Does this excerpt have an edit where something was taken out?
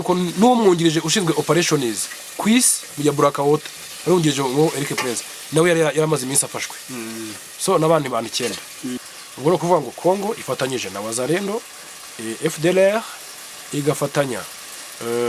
yes; 1 cut; at 9.0 s

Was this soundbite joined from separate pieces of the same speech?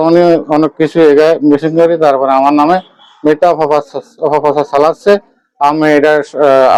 no; 0 cuts

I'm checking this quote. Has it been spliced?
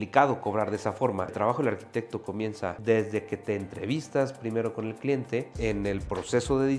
yes; 3 cuts; at 1.3 s, 2.8 s, 5.5 s

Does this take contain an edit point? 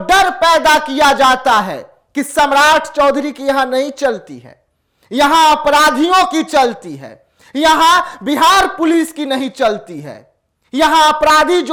no; 0 cuts

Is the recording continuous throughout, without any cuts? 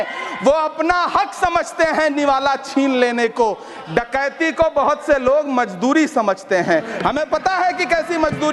yes; 0 cuts

